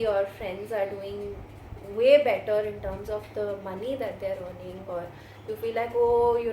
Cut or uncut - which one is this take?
uncut